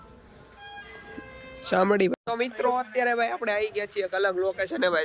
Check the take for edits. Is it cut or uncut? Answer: cut